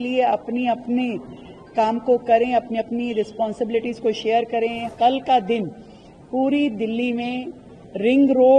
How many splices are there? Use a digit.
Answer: 1